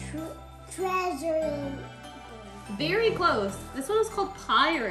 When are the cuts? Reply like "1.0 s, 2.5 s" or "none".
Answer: 3.2 s